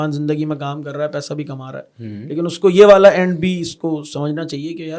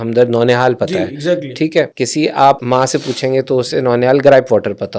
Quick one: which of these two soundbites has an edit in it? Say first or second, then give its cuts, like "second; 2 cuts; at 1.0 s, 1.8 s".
second; 2 cuts; at 1.9 s, 2.6 s